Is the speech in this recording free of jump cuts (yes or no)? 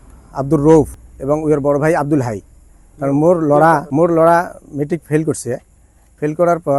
no